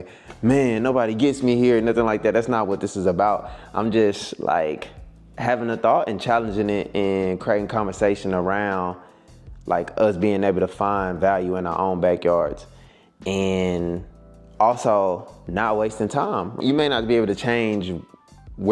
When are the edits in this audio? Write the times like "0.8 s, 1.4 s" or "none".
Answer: none